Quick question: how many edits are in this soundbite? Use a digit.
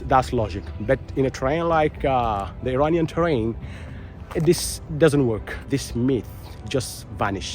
1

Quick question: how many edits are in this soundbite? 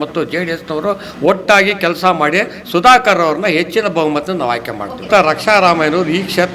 1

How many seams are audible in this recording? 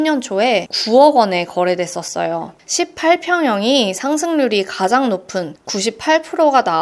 1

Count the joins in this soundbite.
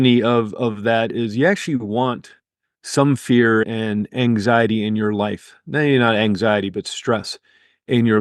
1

